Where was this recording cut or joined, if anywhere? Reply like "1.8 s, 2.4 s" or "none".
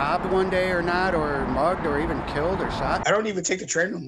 3.0 s